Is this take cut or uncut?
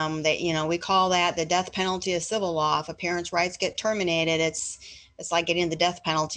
uncut